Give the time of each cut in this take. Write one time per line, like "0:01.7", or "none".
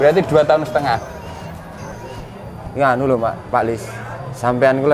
0:01.8